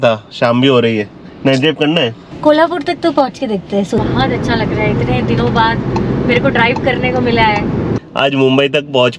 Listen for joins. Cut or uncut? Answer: cut